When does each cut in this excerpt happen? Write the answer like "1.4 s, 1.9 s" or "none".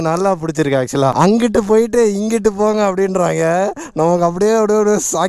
none